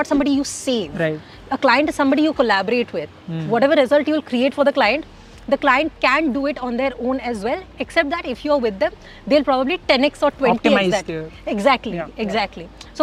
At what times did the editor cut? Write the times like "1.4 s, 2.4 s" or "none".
none